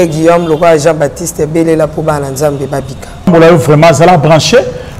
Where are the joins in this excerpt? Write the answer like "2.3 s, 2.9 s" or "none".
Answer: 3.3 s